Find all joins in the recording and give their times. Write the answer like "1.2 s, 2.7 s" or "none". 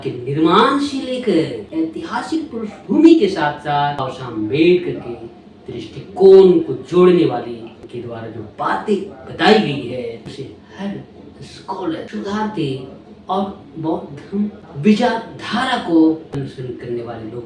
1.6 s, 4.2 s, 7.9 s, 10.3 s, 12.1 s, 16.4 s